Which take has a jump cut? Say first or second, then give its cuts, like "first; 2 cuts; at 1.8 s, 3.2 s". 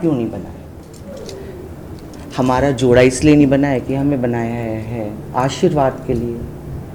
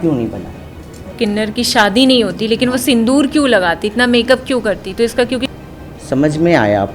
second; 2 cuts; at 1.1 s, 5.5 s